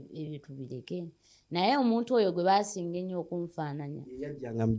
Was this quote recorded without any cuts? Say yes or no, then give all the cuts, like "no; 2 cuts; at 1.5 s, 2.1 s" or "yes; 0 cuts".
yes; 0 cuts